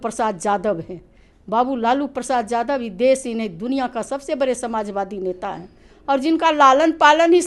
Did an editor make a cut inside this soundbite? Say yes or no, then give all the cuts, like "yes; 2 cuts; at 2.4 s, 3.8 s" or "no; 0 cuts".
no; 0 cuts